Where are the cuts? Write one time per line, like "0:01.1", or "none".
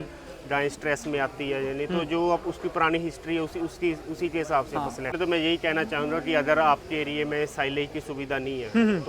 0:05.1